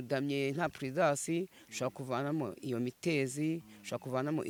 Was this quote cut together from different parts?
no; 0 cuts

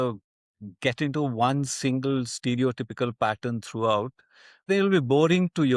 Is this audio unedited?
no; 1 cut; at 4.7 s

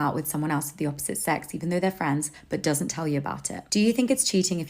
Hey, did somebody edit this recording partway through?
yes; 1 cut; at 3.6 s

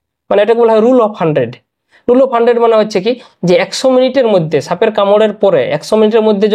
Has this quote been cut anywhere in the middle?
no; 0 cuts

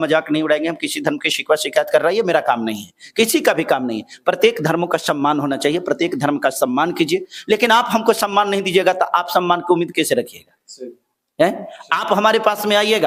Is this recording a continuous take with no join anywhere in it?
yes; 0 cuts

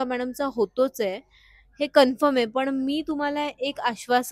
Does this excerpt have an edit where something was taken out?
no; 0 cuts

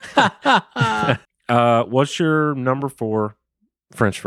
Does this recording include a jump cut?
yes; 1 cut; at 1.3 s

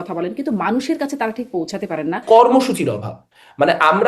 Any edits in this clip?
yes; 1 cut; at 2.2 s

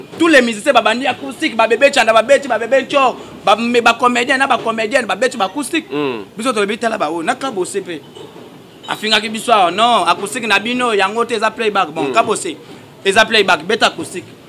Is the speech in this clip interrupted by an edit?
no; 0 cuts

